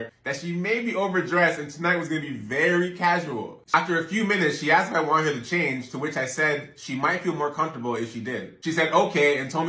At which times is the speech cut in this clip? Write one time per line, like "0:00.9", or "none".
0:03.7